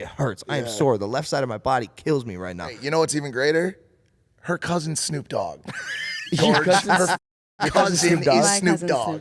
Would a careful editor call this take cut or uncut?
cut